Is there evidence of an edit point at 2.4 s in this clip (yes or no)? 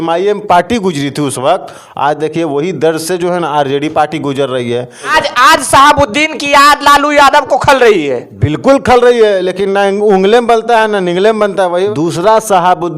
no